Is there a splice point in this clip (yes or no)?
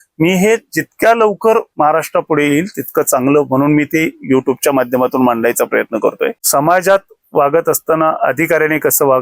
yes